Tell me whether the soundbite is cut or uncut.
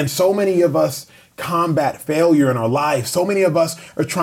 cut